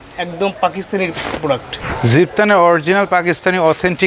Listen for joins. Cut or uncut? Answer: cut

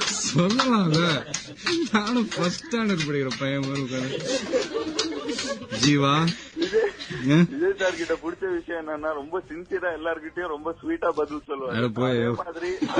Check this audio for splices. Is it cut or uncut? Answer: uncut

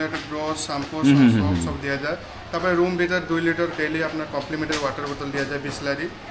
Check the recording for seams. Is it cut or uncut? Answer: uncut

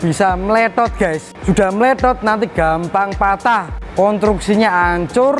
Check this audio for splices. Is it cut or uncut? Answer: cut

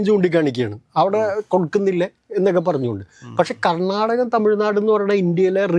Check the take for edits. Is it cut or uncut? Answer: uncut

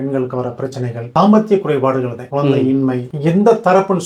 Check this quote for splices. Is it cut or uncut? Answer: cut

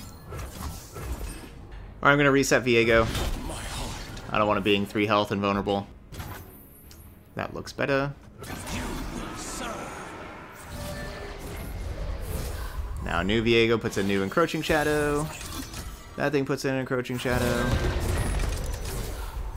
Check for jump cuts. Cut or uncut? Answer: cut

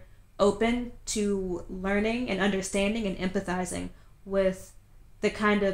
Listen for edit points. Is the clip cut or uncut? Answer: uncut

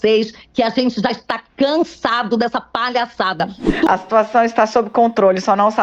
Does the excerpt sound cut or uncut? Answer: cut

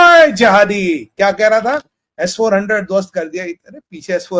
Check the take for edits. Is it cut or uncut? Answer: uncut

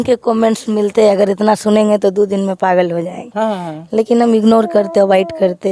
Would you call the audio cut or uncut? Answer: uncut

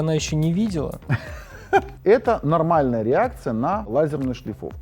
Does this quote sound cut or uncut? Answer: cut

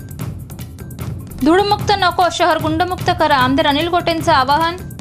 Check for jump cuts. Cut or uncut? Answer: uncut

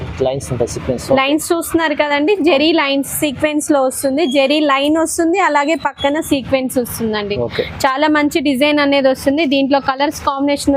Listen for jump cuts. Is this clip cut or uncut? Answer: uncut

